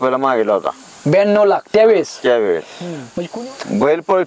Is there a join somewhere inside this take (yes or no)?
yes